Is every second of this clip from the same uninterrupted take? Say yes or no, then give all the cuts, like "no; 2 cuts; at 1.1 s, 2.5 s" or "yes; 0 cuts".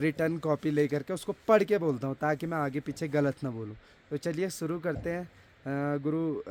yes; 0 cuts